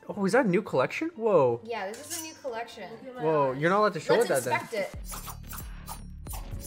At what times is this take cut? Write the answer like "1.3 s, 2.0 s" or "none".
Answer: 4.9 s